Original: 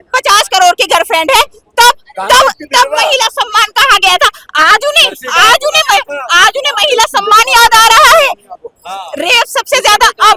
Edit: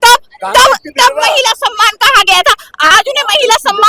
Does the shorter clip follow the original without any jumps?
no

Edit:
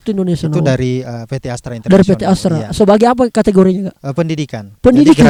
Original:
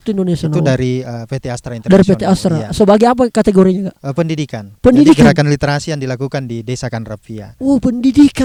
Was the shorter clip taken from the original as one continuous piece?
yes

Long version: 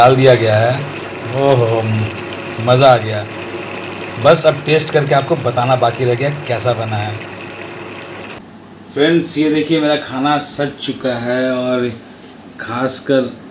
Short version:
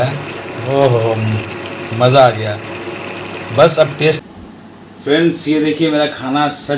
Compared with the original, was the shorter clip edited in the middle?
yes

